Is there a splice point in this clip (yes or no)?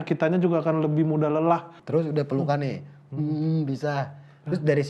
yes